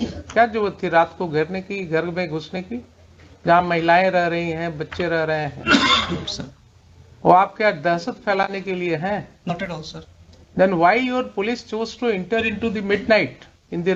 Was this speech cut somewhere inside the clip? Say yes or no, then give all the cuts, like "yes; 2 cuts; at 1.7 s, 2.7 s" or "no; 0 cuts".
no; 0 cuts